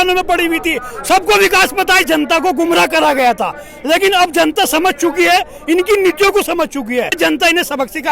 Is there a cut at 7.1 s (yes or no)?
yes